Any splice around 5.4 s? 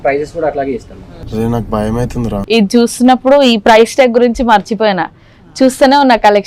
no; 1 cut; at 2.4 s

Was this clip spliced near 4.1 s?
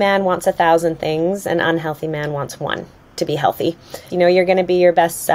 yes; 1 cut; at 4.1 s

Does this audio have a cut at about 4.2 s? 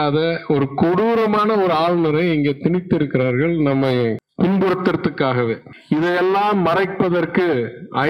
yes; 1 cut; at 4.2 s

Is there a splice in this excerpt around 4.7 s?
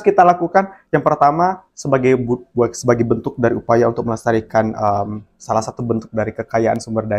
no; 0 cuts

